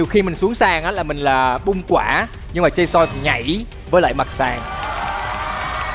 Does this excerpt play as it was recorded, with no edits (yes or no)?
yes